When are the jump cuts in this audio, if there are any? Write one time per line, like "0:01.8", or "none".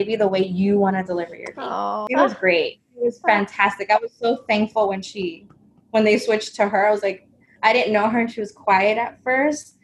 0:02.0